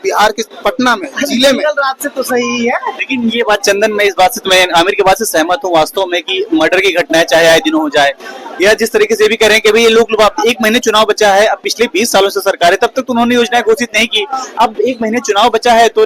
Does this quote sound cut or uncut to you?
uncut